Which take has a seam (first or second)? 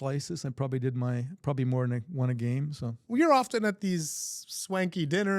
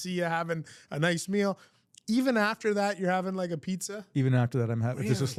first